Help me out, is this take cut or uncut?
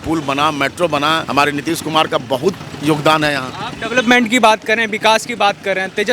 cut